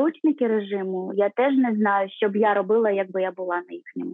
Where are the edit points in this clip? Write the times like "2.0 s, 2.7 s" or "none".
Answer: 1.1 s